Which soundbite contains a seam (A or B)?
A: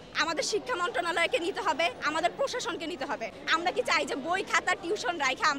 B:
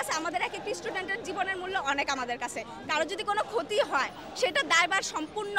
A